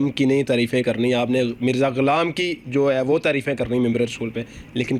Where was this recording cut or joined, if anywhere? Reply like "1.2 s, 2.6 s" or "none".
none